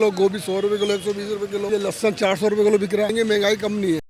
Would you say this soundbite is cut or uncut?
cut